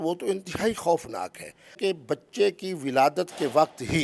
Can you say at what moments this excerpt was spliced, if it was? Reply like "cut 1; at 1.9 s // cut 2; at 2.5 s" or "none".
cut 1; at 1.8 s